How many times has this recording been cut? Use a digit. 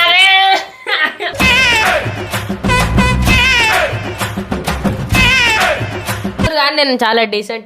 1